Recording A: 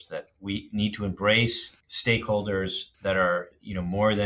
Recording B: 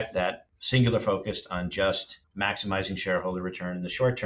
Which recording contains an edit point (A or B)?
A